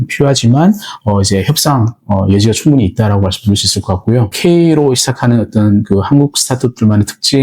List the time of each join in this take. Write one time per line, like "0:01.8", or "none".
0:04.3